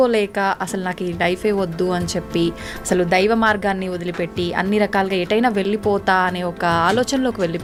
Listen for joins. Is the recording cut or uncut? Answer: uncut